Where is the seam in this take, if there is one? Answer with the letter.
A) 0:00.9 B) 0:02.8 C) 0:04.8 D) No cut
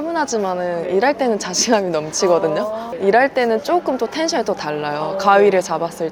B